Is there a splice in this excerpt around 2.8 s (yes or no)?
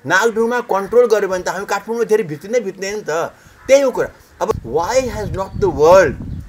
no